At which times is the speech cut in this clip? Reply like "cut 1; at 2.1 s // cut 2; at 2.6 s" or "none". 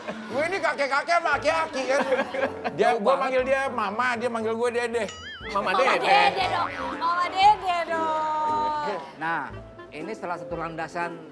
cut 1; at 2.6 s // cut 2; at 9.1 s